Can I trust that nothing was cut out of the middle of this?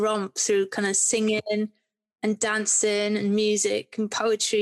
yes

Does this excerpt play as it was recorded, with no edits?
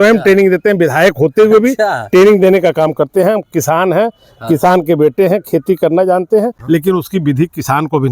no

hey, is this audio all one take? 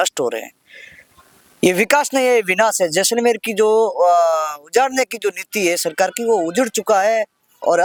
yes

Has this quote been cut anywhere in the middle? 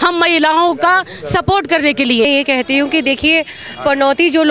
yes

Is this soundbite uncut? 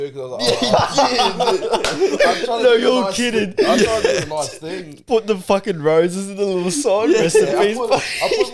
yes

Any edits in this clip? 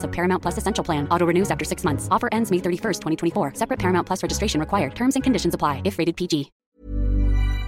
yes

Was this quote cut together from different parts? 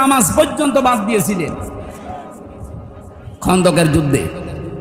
no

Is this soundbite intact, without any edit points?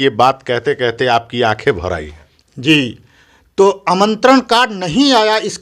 yes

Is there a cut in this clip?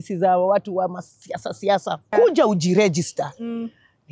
yes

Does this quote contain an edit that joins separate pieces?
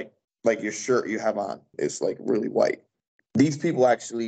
yes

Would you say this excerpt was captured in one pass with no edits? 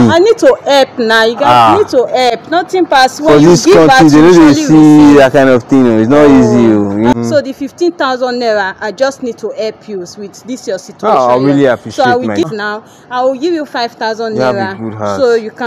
no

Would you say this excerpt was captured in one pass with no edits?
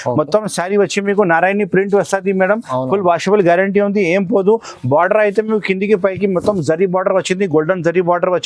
yes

